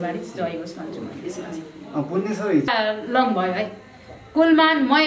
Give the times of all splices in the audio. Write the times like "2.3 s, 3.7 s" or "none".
2.7 s